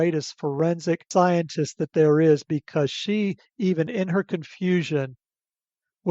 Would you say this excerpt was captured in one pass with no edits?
no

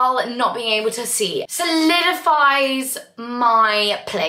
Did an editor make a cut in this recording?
yes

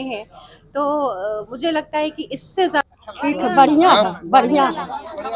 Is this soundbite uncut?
no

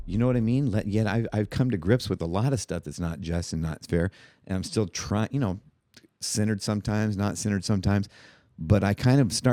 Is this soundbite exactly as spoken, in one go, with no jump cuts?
yes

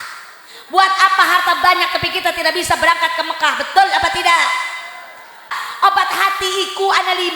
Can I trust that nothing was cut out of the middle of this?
no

